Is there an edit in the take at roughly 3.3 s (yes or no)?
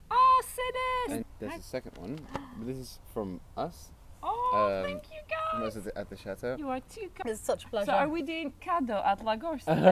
no